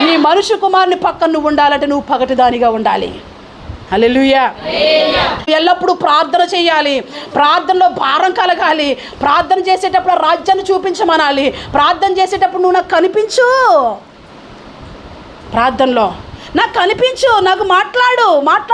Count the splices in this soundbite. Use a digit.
1